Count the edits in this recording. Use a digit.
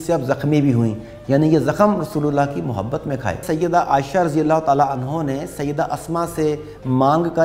1